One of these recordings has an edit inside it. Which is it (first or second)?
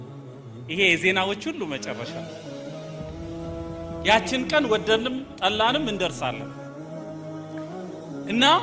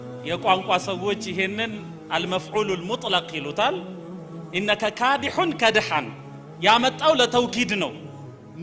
first